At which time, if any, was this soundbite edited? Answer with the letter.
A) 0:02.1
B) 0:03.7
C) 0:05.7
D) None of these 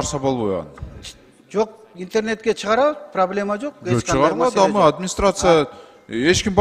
D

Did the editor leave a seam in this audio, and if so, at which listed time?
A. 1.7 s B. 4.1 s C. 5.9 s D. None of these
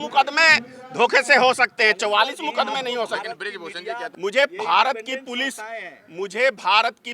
B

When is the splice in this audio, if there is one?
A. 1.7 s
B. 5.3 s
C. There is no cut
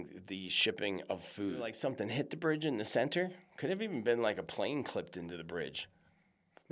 A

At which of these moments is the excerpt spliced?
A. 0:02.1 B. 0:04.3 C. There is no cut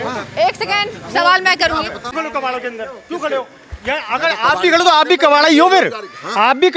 A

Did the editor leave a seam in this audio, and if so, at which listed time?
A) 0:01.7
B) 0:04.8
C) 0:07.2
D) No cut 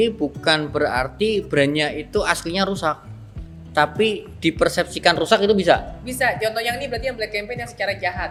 D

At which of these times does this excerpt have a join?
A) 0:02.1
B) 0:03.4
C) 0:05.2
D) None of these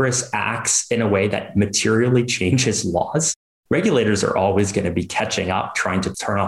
D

